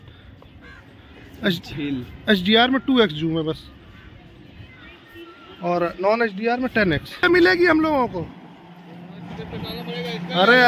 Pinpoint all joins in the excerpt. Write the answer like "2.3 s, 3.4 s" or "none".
7.3 s